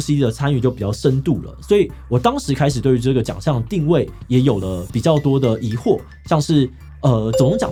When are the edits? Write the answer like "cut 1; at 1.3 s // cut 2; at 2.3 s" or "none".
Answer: none